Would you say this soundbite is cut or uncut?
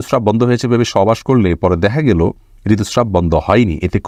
uncut